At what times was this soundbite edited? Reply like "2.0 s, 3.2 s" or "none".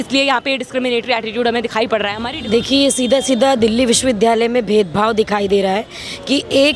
2.2 s